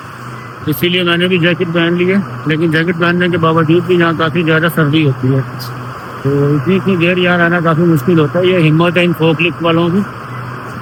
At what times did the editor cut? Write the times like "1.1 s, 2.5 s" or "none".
none